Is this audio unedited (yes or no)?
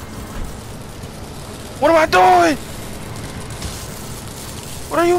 yes